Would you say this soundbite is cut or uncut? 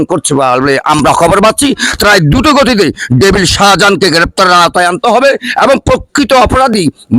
uncut